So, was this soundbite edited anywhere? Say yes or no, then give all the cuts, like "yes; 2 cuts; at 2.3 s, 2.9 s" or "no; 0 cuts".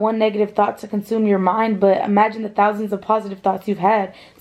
no; 0 cuts